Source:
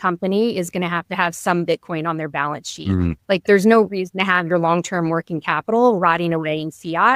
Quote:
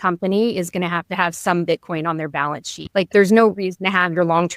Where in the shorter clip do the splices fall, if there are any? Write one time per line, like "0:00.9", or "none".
0:02.8

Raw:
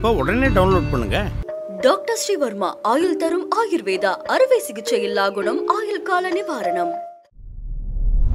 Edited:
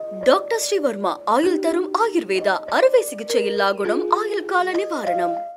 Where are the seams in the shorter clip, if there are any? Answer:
none

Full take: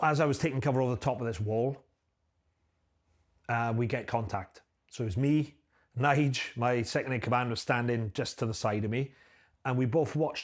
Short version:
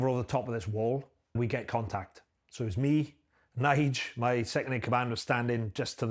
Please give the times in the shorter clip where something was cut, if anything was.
0:01.3

